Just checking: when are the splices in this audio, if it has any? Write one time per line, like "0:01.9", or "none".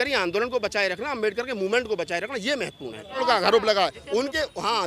0:03.2